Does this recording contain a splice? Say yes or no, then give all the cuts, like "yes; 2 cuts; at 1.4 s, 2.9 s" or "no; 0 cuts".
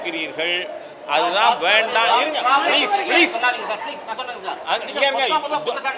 no; 0 cuts